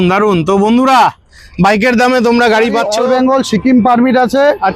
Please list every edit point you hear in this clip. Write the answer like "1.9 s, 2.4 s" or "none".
2.9 s